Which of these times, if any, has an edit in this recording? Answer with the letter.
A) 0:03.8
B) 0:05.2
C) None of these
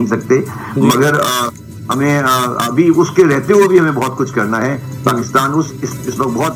C